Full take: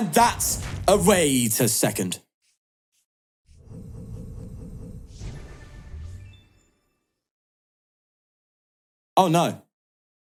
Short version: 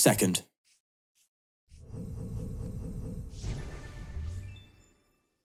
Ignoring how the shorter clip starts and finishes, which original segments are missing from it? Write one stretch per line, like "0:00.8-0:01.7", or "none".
none